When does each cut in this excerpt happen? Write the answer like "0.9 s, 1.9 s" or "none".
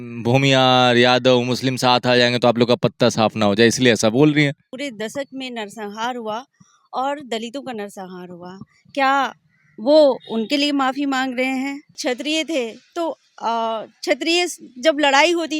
4.7 s, 11.9 s